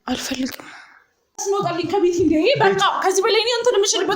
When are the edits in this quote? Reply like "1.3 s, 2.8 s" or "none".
1.4 s